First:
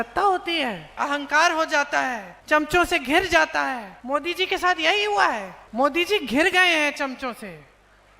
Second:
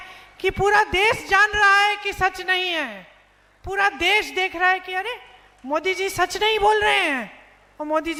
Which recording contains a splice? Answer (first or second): first